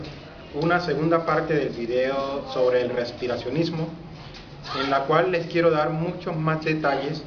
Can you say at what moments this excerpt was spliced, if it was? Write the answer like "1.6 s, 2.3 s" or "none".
none